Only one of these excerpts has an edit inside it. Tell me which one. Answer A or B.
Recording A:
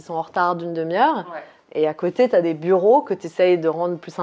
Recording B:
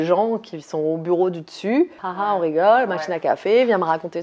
B